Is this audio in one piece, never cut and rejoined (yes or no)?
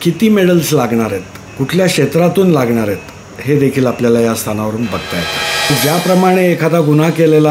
no